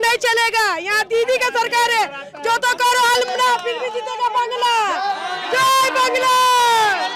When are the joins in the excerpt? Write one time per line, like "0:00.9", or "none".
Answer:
none